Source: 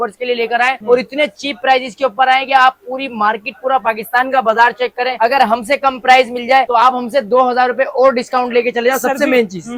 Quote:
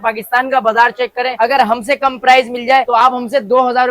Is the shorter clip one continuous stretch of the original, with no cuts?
yes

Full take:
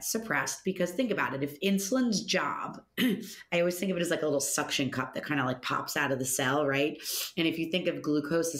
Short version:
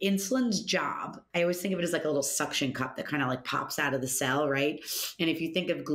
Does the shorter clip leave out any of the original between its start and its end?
yes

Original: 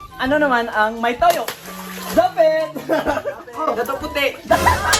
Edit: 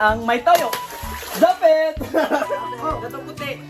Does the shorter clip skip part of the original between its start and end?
no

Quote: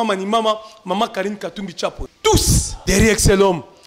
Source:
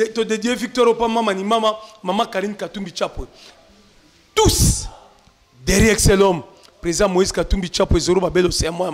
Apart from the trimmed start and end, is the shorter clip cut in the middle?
yes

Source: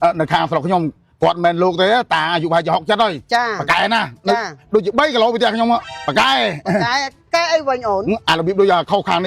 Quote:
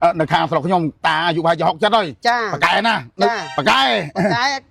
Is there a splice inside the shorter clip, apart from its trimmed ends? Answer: yes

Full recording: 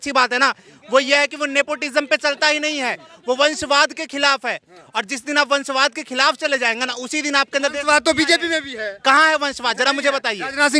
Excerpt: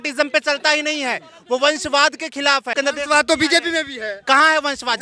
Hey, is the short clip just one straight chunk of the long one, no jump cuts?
no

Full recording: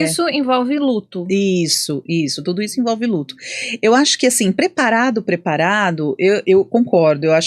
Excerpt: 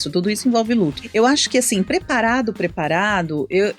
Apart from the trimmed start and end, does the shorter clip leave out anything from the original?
yes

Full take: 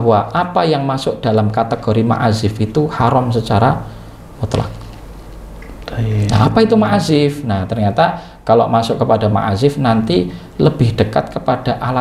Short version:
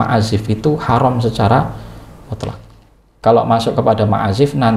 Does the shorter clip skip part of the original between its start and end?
yes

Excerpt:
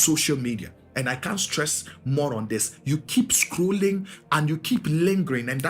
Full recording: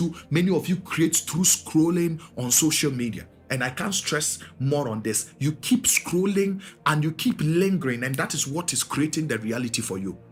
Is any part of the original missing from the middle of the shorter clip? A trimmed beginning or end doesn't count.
no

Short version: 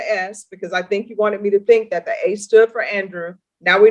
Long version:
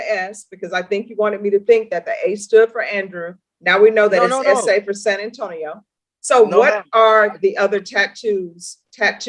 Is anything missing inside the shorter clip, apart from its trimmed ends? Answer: no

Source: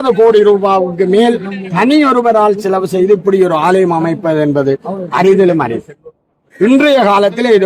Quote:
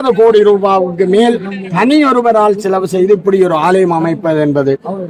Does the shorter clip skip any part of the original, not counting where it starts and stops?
no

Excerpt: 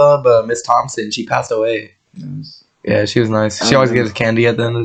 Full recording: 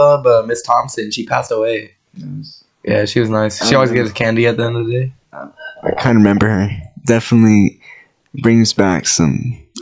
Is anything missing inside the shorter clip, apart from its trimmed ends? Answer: no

